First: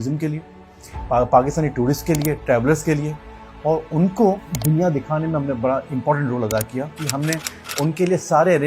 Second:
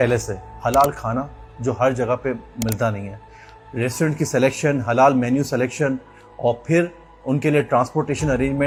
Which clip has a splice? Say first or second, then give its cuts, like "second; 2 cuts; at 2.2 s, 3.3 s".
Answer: first; 2 cuts; at 4.5 s, 7.1 s